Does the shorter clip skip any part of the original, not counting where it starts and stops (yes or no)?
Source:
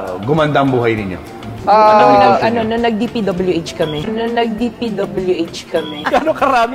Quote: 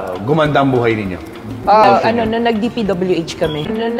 yes